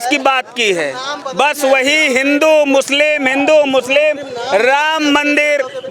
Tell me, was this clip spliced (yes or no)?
no